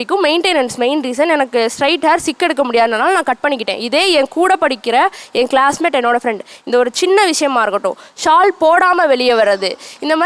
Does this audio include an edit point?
no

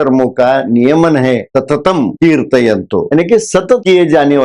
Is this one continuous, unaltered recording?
yes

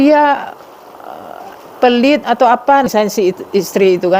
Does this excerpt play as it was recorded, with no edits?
no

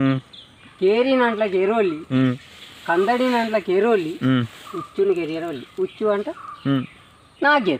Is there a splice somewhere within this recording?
no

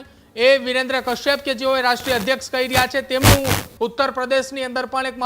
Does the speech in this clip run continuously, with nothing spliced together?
no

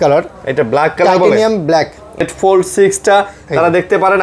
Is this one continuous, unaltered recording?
no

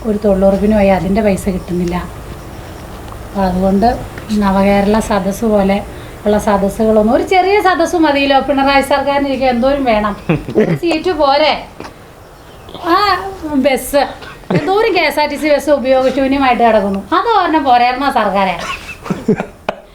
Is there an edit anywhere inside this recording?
no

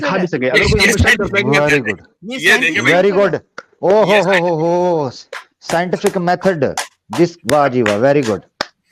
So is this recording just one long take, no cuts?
yes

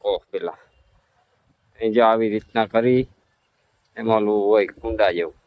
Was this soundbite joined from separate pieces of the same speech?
no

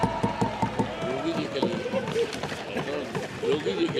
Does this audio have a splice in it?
no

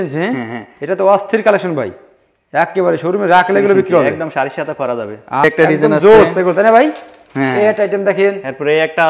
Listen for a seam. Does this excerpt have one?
yes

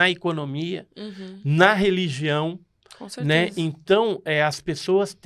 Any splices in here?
no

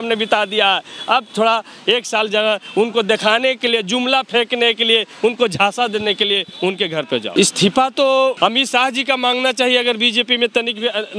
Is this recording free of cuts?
no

